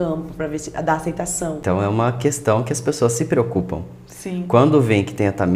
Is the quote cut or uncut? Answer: cut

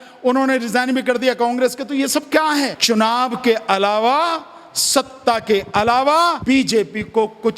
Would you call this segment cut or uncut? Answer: cut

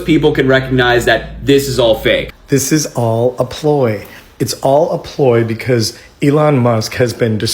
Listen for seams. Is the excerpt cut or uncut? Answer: cut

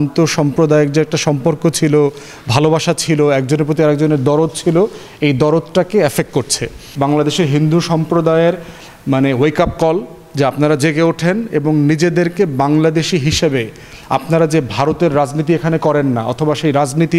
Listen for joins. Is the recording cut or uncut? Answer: cut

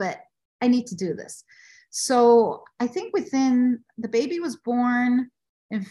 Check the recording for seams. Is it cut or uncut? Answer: uncut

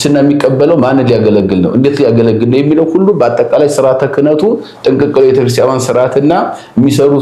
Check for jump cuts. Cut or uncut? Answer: uncut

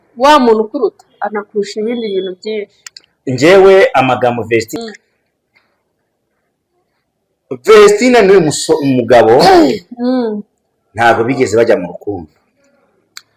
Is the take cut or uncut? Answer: uncut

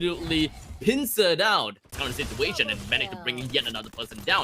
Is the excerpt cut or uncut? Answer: cut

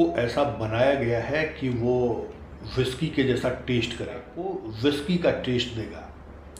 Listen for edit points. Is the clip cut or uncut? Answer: cut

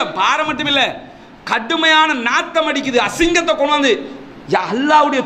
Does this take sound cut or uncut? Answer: uncut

